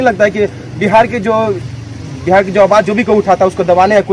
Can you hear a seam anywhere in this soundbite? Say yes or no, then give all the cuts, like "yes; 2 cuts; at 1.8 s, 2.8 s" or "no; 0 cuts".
no; 0 cuts